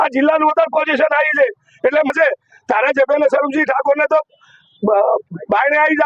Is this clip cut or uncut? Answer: cut